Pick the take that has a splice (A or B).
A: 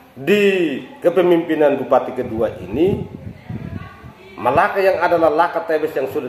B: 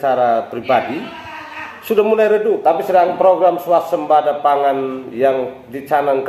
B